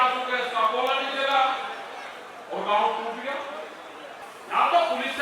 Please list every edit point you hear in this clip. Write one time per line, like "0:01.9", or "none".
0:04.2